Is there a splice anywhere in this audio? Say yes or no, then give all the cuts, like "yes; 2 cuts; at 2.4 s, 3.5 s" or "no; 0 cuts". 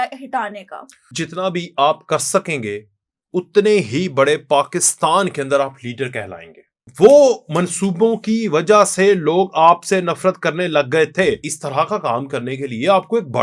yes; 3 cuts; at 1.2 s, 6.9 s, 11.5 s